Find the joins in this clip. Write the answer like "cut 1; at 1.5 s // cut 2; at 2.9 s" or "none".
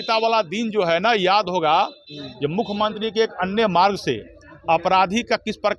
none